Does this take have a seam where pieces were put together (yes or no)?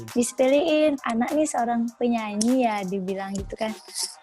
yes